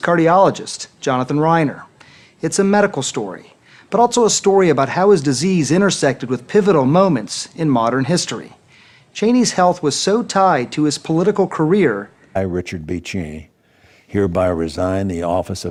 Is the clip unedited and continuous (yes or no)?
yes